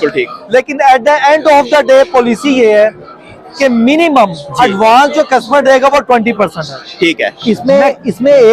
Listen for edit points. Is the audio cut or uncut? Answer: cut